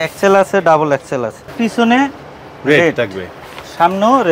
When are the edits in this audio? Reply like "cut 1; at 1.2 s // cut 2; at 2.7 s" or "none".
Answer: cut 1; at 1.5 s